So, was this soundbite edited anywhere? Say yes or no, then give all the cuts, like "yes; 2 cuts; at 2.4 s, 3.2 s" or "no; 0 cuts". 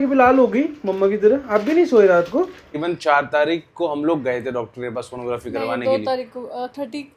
yes; 1 cut; at 2.8 s